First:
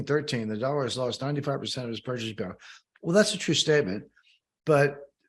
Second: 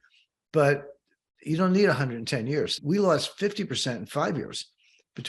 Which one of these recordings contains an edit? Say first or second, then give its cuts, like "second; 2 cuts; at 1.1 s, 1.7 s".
second; 1 cut; at 2.8 s